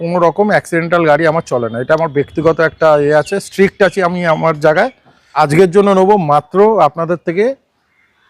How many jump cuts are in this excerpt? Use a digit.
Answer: 1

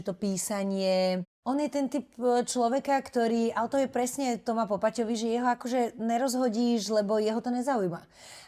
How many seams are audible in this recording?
1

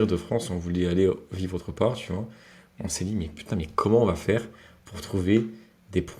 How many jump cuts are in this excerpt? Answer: 0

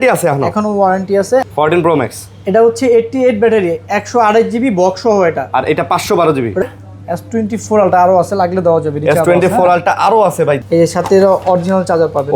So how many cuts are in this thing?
3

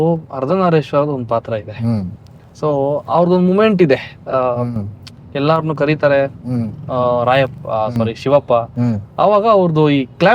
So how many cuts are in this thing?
0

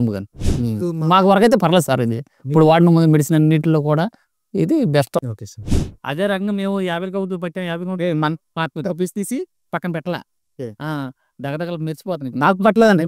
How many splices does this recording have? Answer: 1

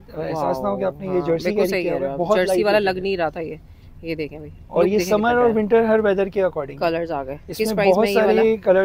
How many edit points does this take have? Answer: 0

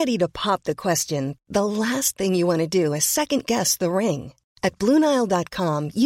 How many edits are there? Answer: 0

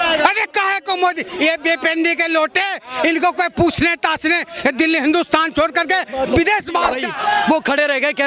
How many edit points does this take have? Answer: 1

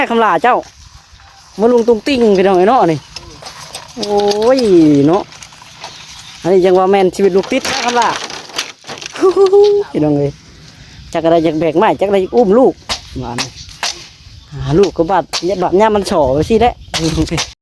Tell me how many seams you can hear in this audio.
0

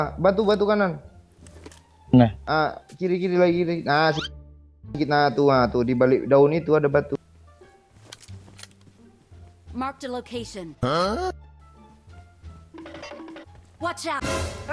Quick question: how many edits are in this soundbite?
0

